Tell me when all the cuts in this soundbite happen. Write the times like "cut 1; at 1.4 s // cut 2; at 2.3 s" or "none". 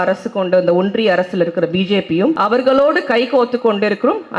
cut 1; at 2.4 s